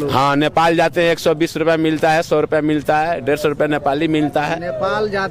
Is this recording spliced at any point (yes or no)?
no